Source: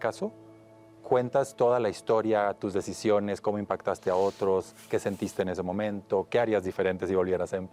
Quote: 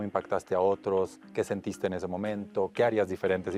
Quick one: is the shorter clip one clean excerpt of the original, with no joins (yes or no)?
yes